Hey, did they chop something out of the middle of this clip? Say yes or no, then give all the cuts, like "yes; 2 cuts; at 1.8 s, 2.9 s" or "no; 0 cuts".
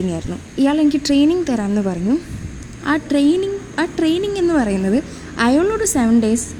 no; 0 cuts